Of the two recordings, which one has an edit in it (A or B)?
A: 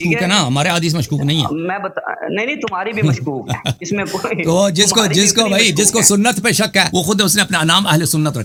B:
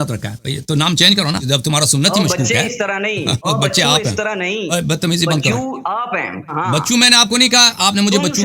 B